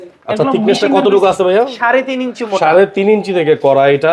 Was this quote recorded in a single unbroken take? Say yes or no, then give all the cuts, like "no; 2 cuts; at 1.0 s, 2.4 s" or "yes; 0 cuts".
yes; 0 cuts